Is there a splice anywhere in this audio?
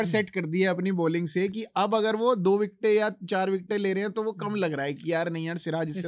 no; 0 cuts

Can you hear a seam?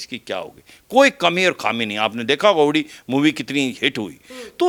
no; 0 cuts

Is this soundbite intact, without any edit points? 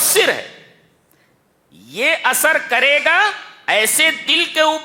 yes; 0 cuts

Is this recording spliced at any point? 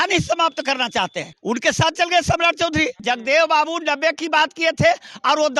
yes; 2 cuts; at 1.3 s, 3.0 s

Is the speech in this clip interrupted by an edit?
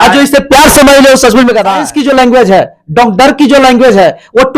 yes; 1 cut; at 1.9 s

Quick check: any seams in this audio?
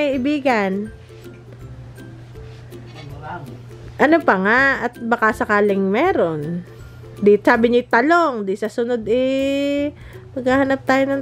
no; 0 cuts

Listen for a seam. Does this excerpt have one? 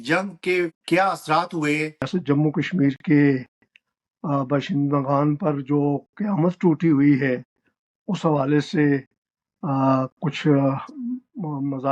yes; 1 cut; at 2.1 s

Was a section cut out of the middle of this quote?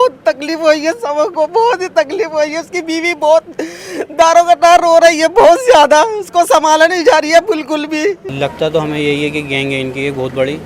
yes; 1 cut; at 8.3 s

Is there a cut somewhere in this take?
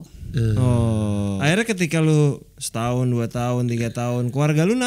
yes; 1 cut; at 1.4 s

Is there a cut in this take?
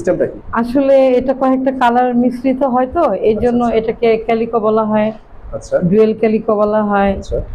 no; 0 cuts

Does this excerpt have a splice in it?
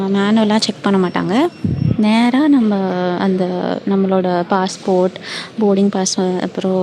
no; 0 cuts

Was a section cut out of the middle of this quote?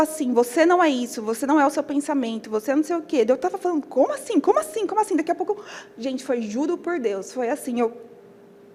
no; 0 cuts

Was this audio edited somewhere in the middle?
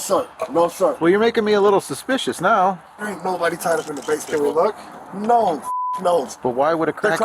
yes; 2 cuts; at 2.9 s, 6.3 s

